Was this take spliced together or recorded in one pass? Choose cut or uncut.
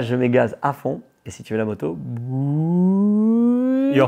uncut